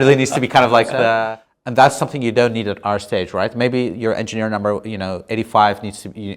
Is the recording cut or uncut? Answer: cut